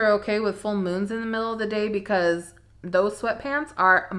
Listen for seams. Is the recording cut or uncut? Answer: uncut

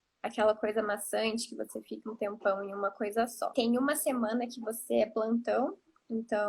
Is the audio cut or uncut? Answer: cut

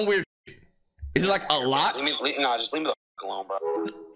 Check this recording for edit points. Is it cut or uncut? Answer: uncut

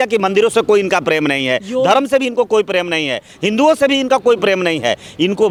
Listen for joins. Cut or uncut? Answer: uncut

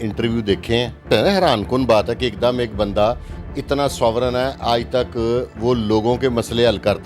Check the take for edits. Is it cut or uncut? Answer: cut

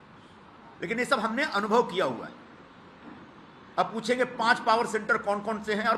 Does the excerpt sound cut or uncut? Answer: uncut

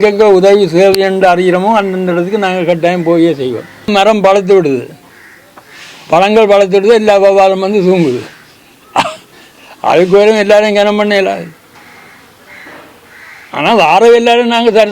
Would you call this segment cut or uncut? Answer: cut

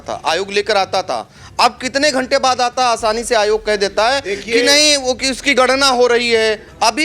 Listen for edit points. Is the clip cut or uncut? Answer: uncut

